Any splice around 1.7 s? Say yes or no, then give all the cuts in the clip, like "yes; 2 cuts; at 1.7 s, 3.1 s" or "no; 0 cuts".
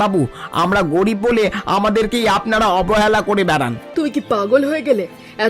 no; 1 cut; at 3.8 s